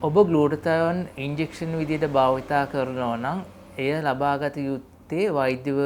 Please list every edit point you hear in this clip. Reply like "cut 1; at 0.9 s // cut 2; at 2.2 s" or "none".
none